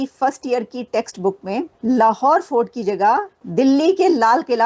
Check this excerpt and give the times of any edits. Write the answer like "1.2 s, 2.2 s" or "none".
none